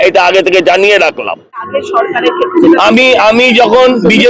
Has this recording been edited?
yes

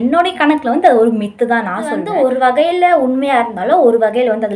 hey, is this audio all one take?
no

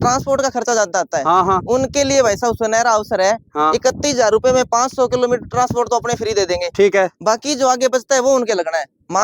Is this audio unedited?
yes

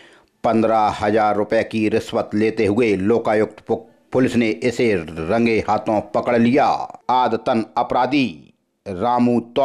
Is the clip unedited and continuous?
no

